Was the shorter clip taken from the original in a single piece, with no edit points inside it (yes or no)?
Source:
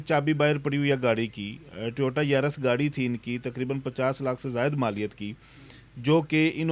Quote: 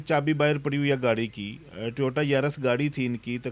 yes